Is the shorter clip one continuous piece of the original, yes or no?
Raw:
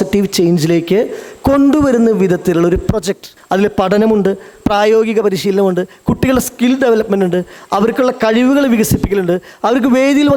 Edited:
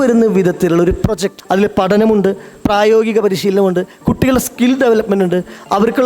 no